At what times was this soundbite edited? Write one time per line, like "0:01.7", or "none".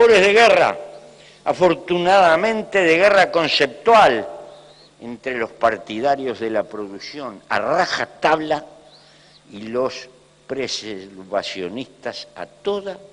none